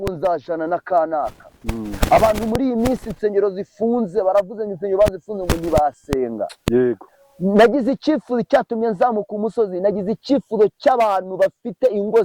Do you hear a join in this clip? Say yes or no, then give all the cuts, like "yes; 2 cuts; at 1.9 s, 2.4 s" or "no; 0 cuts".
yes; 1 cut; at 7.0 s